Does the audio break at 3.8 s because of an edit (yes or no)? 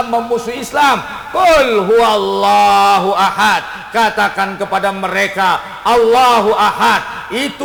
no